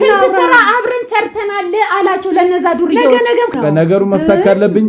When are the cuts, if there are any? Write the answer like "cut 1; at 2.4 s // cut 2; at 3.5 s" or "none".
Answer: cut 1; at 3.5 s